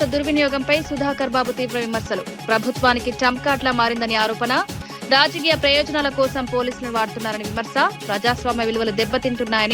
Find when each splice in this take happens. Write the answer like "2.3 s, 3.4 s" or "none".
none